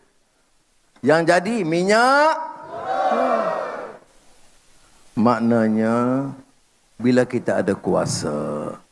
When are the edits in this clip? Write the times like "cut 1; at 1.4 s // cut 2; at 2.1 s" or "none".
none